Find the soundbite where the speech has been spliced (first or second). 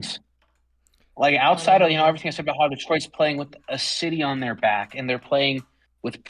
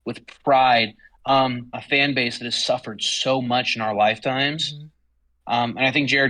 second